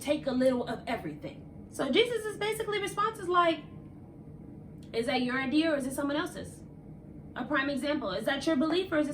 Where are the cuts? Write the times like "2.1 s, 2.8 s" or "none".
1.6 s